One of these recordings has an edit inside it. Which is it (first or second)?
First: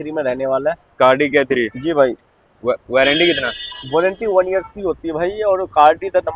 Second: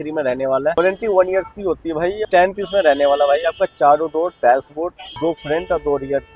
second